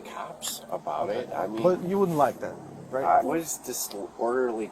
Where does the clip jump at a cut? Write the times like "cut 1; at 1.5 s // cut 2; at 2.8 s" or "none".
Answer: cut 1; at 3.5 s